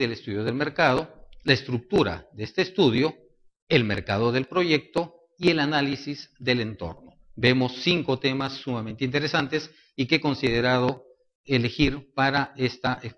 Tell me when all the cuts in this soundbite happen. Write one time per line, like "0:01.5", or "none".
0:01.0